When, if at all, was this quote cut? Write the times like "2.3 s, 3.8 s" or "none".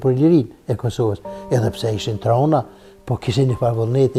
none